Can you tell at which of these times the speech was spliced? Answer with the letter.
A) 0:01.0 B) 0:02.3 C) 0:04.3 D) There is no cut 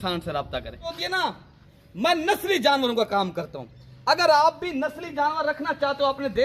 A